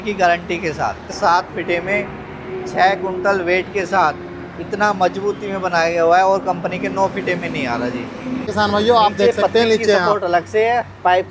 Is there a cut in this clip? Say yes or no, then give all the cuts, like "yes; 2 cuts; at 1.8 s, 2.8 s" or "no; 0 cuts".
yes; 2 cuts; at 1.1 s, 8.5 s